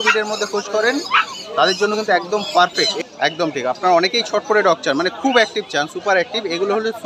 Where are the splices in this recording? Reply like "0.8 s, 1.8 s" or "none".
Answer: 2.9 s